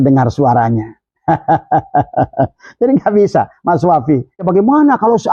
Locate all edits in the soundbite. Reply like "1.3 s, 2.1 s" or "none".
4.4 s